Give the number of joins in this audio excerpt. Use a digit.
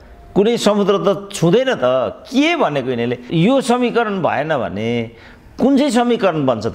1